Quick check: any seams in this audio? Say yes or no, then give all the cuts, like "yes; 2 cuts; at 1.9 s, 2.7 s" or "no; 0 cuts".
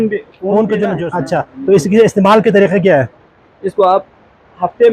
yes; 1 cut; at 1.1 s